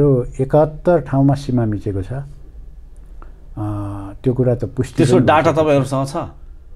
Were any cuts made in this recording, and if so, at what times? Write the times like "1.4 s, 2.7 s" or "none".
none